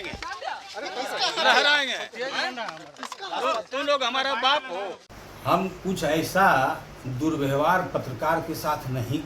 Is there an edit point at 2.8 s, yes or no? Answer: no